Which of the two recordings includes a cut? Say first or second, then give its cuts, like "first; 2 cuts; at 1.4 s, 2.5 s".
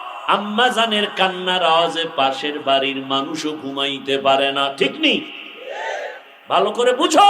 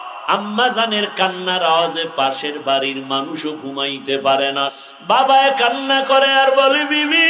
second; 1 cut; at 4.7 s